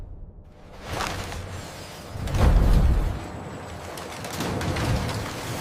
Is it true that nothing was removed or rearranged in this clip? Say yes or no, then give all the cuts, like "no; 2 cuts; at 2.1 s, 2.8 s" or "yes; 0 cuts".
yes; 0 cuts